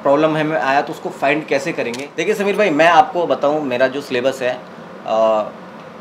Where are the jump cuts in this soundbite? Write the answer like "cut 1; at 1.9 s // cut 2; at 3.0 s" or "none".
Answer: cut 1; at 2.1 s